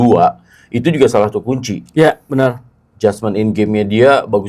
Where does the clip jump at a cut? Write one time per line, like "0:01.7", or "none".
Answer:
none